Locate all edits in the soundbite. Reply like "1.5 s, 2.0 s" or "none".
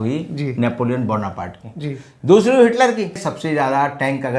3.2 s